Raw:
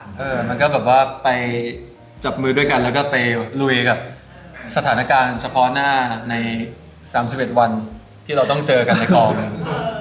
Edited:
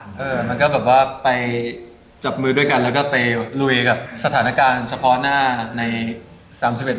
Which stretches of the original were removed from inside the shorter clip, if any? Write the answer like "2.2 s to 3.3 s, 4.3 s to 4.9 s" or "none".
4.1 s to 4.6 s